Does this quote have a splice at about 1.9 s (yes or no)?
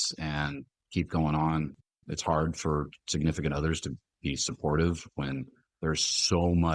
yes